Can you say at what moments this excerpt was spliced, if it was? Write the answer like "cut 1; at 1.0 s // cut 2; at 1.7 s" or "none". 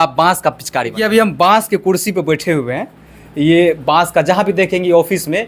cut 1; at 0.9 s